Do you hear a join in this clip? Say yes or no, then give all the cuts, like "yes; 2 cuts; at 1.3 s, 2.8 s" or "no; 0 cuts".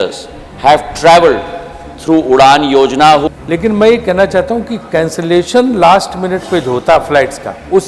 yes; 1 cut; at 3.3 s